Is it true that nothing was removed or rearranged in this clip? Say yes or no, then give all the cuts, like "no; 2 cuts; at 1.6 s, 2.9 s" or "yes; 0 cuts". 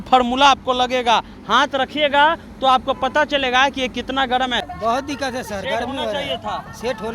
no; 1 cut; at 4.7 s